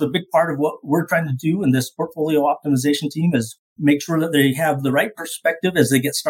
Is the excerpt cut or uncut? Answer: cut